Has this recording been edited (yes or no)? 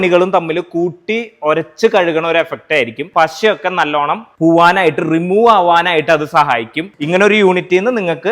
yes